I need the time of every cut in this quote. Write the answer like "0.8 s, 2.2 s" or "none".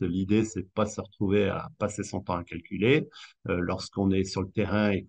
none